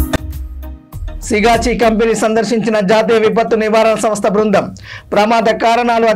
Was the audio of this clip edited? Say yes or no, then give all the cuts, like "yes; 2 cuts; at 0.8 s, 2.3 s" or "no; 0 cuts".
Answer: yes; 1 cut; at 1.2 s